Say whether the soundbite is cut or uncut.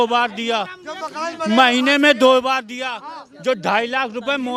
uncut